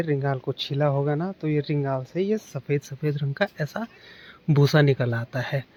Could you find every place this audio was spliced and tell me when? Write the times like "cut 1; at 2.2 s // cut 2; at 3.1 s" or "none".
none